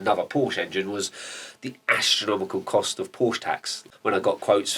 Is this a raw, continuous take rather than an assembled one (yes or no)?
no